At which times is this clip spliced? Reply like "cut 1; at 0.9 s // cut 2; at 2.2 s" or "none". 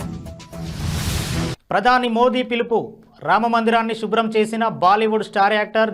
cut 1; at 1.6 s